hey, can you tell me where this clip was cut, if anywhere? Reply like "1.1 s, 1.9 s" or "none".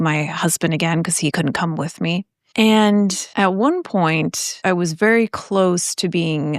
1.3 s, 2.4 s, 3.2 s, 4.5 s